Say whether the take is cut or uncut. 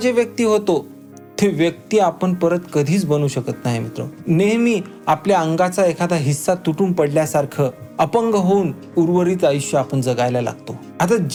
uncut